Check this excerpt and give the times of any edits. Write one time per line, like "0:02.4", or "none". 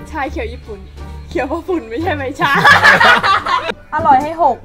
0:03.6